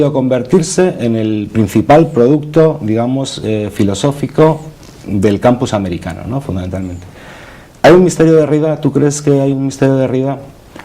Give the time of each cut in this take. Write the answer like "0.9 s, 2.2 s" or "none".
6.7 s